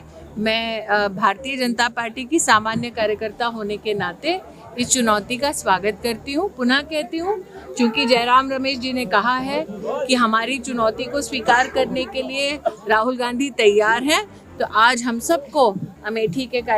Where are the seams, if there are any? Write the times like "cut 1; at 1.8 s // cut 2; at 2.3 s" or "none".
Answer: none